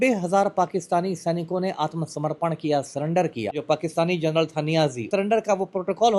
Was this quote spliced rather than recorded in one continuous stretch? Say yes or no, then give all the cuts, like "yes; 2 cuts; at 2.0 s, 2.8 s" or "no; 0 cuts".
yes; 2 cuts; at 3.6 s, 5.1 s